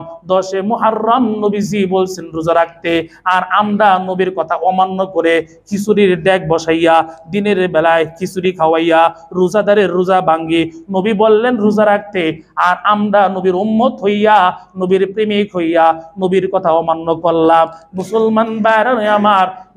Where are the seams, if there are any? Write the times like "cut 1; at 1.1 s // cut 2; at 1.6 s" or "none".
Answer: none